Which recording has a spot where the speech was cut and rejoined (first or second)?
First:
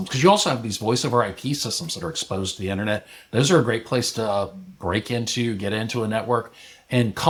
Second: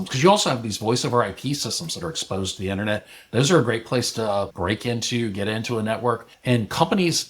second